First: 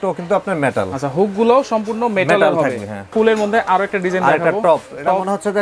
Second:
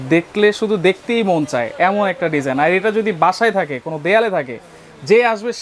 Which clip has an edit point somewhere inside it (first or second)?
first